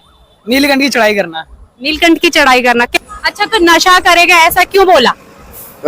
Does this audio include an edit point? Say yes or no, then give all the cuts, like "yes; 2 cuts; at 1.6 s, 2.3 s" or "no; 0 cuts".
yes; 1 cut; at 2.9 s